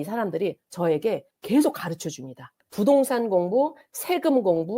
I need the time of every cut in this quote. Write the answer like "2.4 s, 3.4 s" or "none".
2.6 s